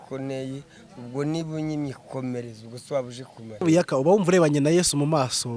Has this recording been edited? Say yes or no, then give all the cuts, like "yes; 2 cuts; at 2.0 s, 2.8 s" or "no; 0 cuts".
yes; 1 cut; at 3.6 s